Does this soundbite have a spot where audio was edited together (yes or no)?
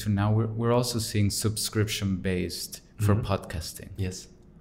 no